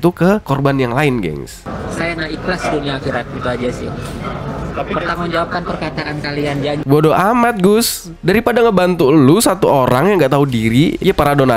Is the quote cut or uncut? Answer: cut